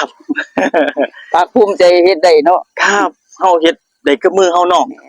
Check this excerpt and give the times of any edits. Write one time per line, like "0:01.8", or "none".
none